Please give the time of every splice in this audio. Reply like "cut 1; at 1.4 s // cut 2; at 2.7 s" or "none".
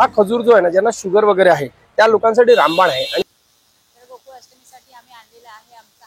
cut 1; at 3.2 s

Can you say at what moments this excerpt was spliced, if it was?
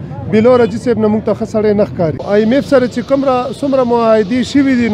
cut 1; at 2.2 s

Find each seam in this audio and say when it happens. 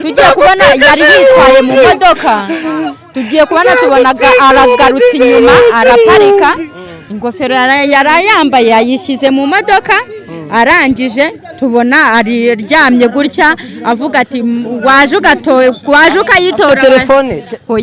none

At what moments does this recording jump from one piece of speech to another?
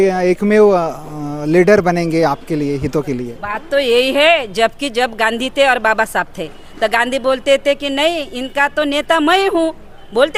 none

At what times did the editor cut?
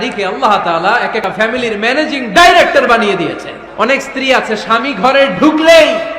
cut 1; at 1.2 s // cut 2; at 3.6 s

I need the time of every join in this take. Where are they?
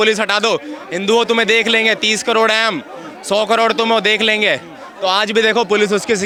none

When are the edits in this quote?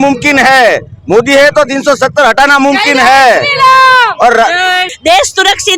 cut 1; at 4.9 s

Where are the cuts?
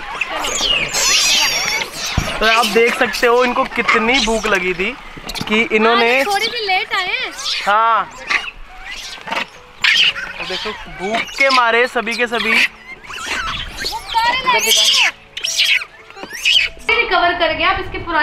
cut 1; at 16.9 s

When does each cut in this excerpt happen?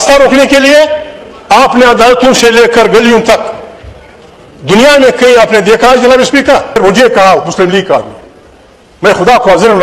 cut 1; at 6.8 s

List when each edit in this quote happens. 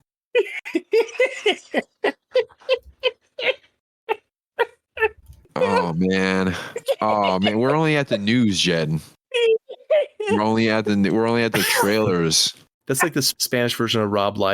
cut 1; at 5.3 s // cut 2; at 13.1 s

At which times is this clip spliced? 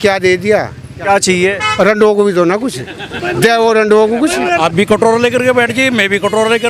cut 1; at 1.0 s // cut 2; at 4.6 s

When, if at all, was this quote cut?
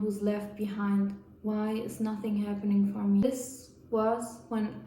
cut 1; at 3.2 s

